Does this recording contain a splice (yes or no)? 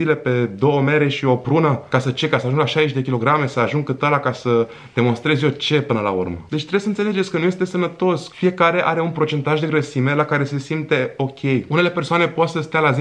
no